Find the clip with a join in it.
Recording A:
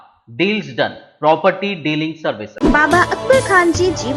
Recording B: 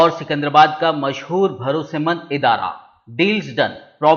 A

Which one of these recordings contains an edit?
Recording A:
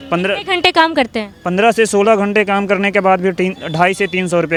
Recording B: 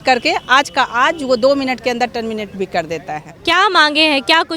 B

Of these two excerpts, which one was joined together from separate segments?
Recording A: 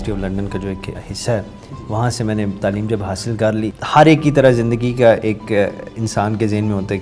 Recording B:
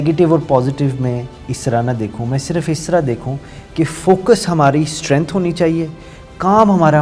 A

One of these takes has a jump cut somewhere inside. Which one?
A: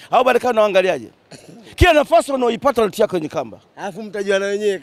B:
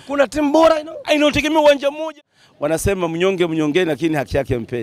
B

